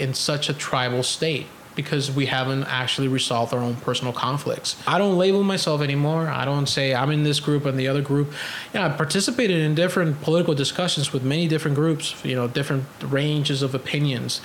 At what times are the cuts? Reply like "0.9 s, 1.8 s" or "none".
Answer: 4.9 s

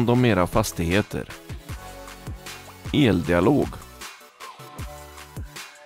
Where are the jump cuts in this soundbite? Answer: 3.8 s

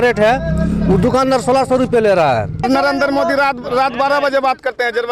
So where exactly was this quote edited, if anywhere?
2.6 s

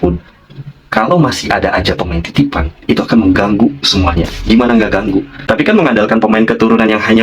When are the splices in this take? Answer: 5.4 s

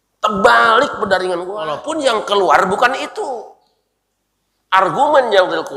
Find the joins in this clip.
1.8 s

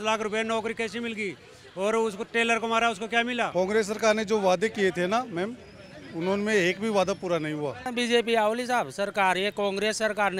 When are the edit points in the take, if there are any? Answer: 3.5 s, 7.8 s

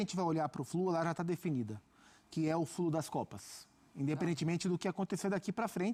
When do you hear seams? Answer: none

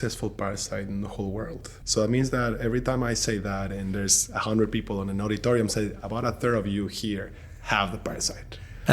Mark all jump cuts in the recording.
1.7 s

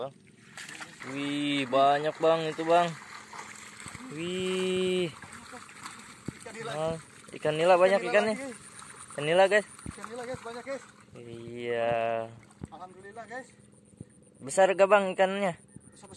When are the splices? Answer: 1.0 s

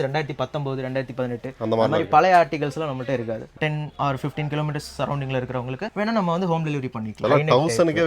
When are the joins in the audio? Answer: 3.6 s, 7.2 s

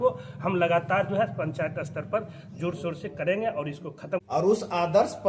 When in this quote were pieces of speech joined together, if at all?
4.2 s

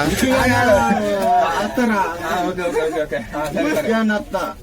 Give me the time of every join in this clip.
none

